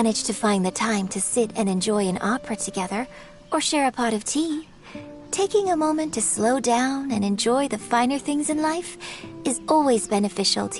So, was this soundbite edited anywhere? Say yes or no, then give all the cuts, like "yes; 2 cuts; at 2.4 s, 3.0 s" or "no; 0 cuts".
no; 0 cuts